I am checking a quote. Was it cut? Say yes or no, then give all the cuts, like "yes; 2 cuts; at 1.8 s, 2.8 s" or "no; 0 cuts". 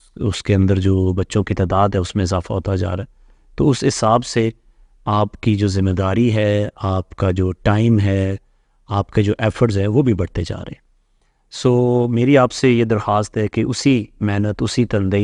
no; 0 cuts